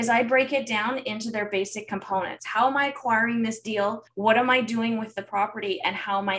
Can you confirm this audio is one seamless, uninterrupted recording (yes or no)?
no